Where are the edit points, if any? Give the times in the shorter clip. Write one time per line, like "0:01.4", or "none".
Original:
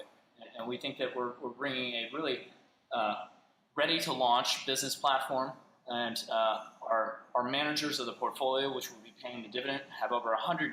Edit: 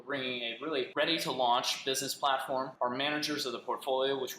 0:00.9
0:02.7